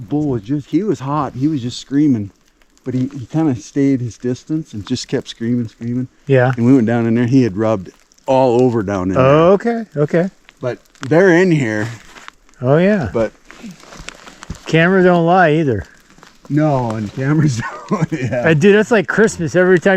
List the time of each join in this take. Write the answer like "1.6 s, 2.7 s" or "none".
none